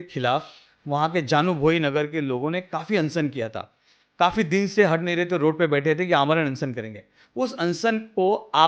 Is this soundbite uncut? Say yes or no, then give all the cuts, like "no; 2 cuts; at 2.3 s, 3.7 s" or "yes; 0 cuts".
yes; 0 cuts